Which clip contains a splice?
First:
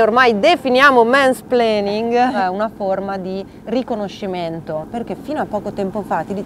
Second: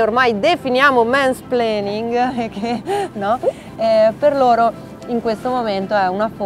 first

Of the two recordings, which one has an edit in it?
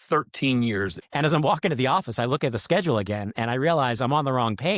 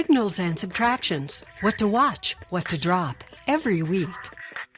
first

